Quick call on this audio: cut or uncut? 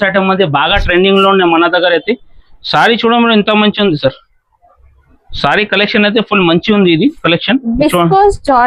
uncut